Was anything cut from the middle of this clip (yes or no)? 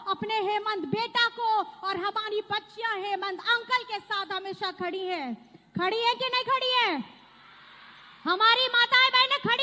no